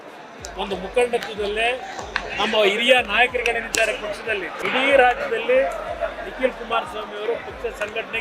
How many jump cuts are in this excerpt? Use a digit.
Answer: 1